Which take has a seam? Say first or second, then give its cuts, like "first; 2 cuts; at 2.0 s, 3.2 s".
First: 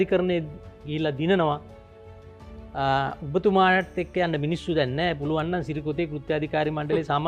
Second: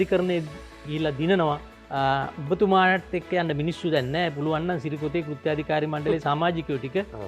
second; 1 cut; at 1.8 s